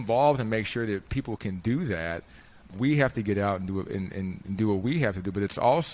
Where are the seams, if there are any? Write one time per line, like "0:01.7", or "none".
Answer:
0:01.1
0:02.6

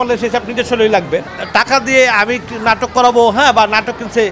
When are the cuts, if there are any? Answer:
0:01.4

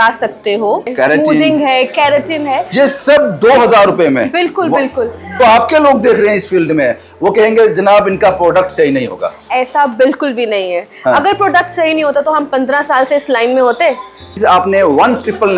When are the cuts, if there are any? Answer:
0:00.9
0:05.2
0:14.3

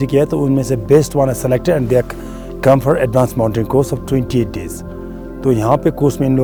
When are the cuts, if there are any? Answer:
none

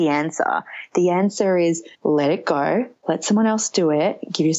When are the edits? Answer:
0:01.9

